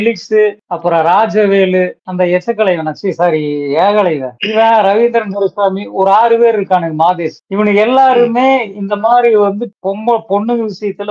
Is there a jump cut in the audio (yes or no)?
yes